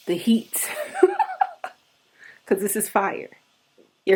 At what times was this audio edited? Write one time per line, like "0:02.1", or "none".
none